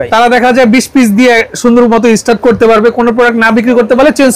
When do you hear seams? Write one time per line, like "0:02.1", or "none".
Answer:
none